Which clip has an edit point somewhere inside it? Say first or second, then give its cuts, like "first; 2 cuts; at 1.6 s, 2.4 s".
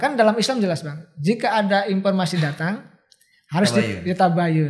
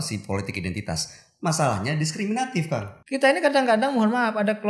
second; 1 cut; at 2.9 s